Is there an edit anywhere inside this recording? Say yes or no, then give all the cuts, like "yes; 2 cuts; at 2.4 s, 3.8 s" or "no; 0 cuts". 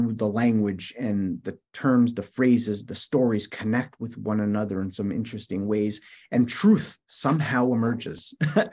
no; 0 cuts